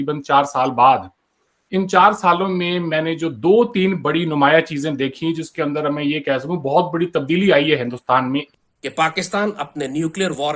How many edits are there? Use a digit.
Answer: 1